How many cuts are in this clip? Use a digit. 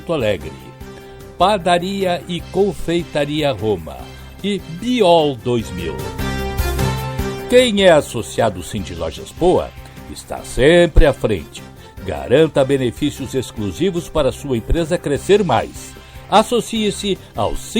2